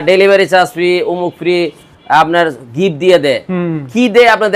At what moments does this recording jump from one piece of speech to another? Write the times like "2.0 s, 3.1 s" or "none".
none